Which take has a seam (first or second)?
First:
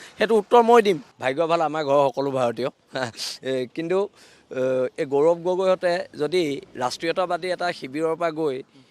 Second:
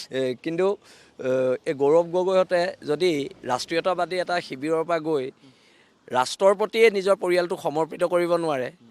first